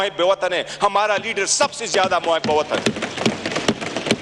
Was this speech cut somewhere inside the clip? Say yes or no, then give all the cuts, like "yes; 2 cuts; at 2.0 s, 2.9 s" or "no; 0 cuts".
no; 0 cuts